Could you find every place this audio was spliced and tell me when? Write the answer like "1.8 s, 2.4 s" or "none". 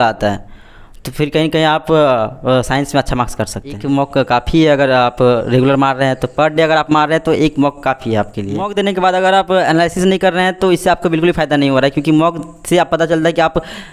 3.8 s, 8.7 s